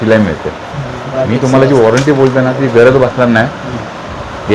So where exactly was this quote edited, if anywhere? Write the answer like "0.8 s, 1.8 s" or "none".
none

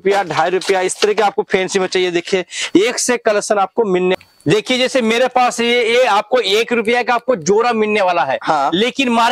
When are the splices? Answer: 4.2 s

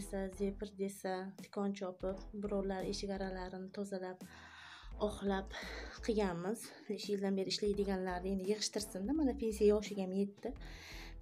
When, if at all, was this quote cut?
7.0 s

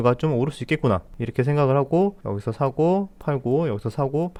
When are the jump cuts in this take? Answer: none

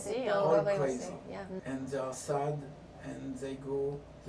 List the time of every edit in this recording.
1.6 s

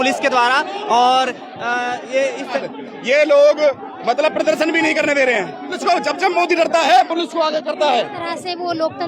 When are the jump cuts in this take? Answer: 2.6 s, 5.7 s, 8.0 s

